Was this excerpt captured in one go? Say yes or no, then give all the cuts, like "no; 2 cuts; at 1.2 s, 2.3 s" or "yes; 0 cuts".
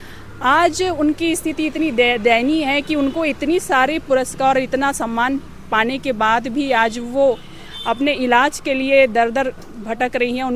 yes; 0 cuts